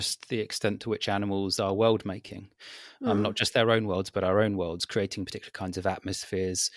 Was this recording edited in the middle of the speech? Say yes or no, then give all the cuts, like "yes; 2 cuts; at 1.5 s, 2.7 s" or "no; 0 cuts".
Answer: no; 0 cuts